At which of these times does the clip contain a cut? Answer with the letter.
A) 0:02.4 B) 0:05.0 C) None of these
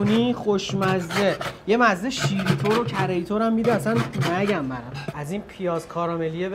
B